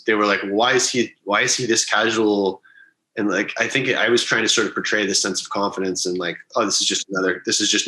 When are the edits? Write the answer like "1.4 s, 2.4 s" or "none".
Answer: none